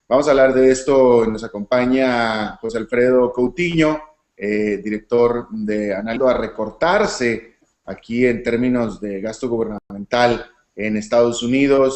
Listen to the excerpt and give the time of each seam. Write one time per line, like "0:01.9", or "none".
none